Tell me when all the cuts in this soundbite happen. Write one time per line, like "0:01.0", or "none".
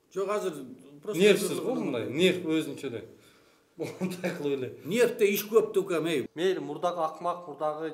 0:06.3